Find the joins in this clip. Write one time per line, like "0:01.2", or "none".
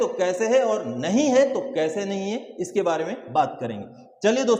none